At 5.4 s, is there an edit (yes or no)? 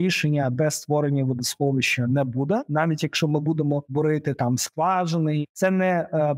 yes